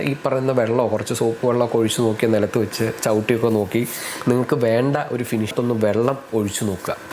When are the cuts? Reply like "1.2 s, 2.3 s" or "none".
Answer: 5.5 s